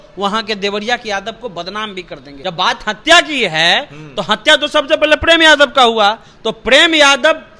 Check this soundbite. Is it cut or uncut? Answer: cut